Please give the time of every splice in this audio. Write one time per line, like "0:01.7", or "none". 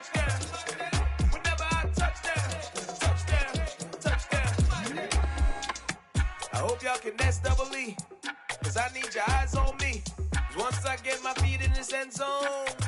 none